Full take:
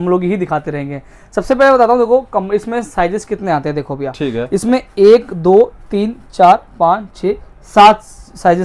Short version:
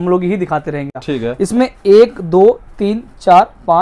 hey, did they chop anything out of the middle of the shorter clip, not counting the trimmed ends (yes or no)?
yes